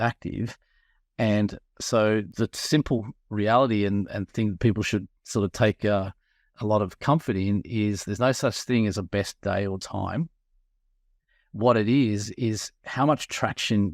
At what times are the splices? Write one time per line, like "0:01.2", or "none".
0:02.3
0:06.5

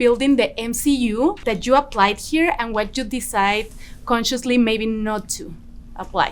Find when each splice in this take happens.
0:01.4

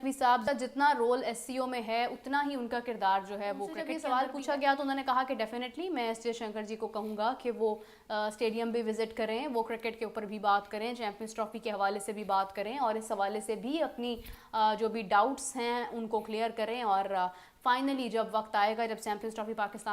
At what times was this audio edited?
0:03.9

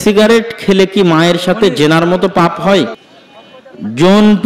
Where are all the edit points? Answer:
0:03.0

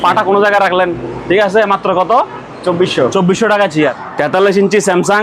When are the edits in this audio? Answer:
0:04.0

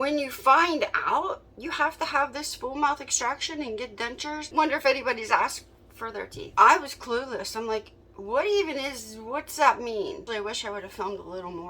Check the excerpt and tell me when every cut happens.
0:04.4
0:06.5
0:10.2

